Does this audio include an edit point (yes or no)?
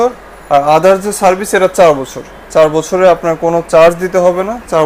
no